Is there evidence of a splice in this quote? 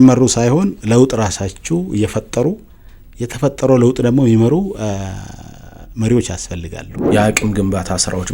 yes; 1 cut; at 6.9 s

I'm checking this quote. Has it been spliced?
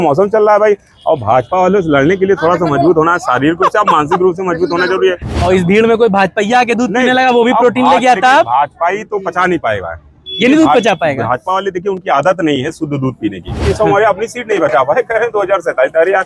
yes; 2 cuts; at 5.4 s, 13.7 s

